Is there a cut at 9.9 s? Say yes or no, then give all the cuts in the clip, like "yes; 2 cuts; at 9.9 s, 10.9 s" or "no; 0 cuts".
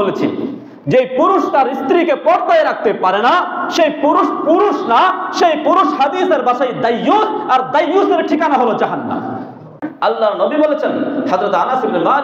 yes; 1 cut; at 9.9 s